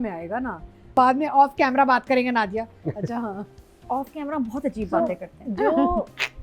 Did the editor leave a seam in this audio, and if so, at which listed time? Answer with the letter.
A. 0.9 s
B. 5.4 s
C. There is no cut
A